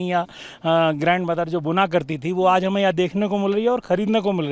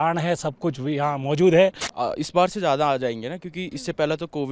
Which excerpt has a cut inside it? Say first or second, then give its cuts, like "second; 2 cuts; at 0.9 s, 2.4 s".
second; 1 cut; at 1.9 s